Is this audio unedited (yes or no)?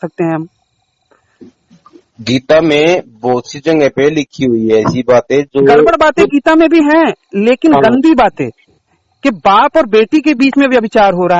yes